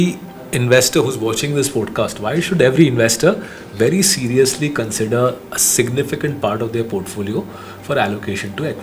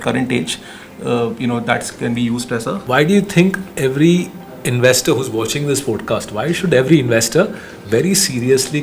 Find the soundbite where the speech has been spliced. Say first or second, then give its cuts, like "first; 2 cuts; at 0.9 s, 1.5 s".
second; 1 cut; at 2.8 s